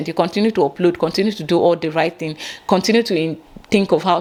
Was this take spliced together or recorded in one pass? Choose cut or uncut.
uncut